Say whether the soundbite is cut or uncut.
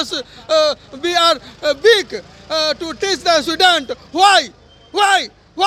uncut